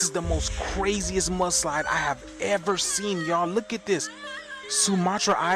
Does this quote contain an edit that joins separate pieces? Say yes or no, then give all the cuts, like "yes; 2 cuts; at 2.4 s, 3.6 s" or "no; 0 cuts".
no; 0 cuts